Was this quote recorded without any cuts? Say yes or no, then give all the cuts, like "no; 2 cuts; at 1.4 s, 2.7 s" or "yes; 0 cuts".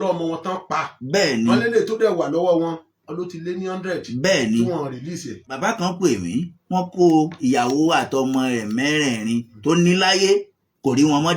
no; 1 cut; at 5.5 s